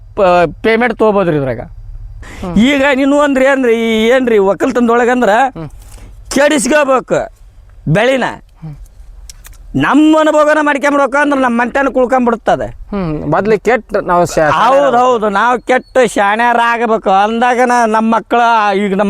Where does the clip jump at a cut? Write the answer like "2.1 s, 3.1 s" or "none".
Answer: 2.3 s